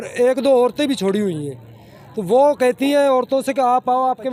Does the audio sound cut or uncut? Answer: uncut